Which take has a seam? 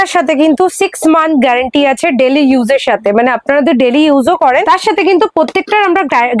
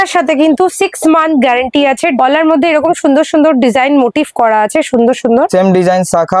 second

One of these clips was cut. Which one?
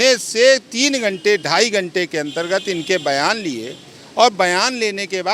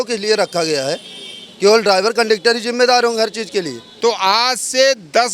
second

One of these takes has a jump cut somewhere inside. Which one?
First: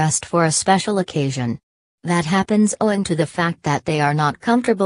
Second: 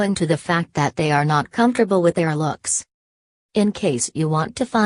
second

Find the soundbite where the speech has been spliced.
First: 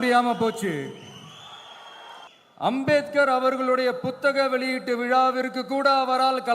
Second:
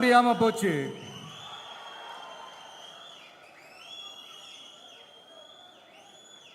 first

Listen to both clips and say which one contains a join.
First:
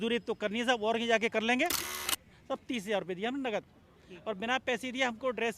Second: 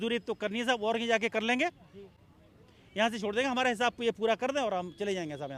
first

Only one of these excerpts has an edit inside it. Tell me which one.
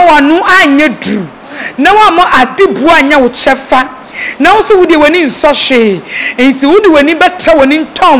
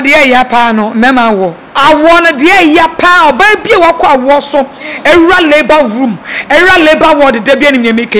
second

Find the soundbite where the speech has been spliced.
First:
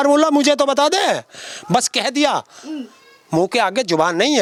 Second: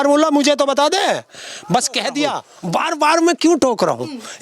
second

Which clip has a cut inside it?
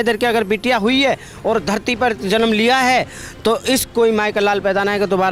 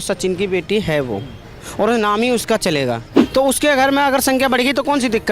second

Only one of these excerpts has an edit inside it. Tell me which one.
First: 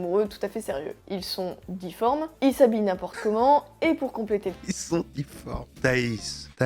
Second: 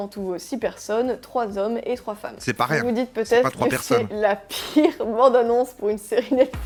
first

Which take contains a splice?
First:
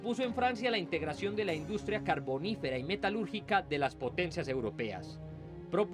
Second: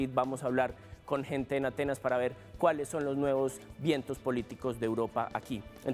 second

